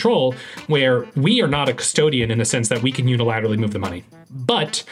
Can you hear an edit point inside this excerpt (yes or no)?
yes